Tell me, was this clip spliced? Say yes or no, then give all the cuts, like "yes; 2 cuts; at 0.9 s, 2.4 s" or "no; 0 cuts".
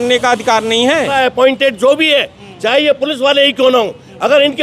yes; 1 cut; at 1.1 s